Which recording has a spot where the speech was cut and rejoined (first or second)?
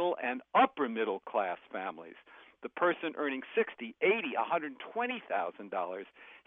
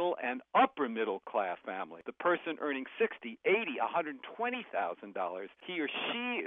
second